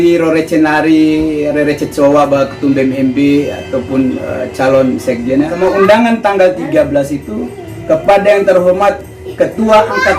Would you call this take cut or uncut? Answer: cut